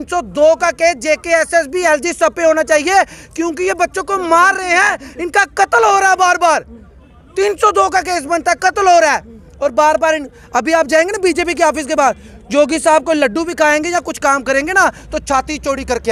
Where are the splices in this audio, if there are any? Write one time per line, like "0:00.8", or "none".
none

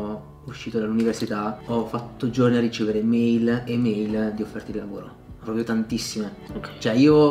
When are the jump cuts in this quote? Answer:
0:01.6

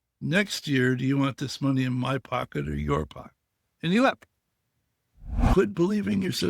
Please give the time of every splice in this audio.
0:05.4

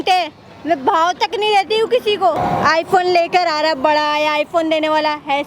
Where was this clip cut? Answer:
0:02.4

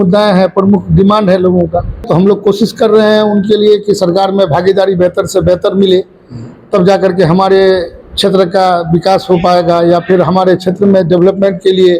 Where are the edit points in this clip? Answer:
0:02.0

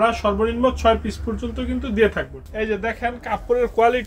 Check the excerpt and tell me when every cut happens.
0:02.4

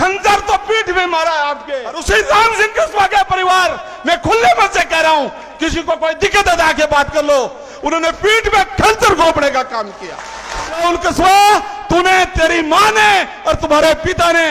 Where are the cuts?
0:01.9
0:10.8

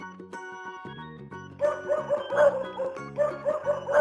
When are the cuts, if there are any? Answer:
0:01.6

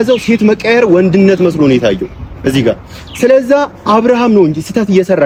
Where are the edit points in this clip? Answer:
none

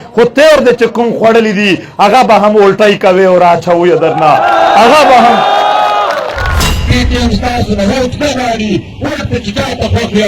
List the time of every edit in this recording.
0:06.7

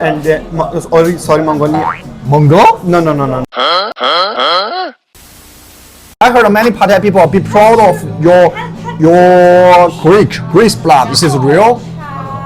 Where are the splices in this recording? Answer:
0:06.0

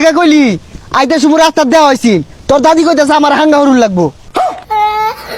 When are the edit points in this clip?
none

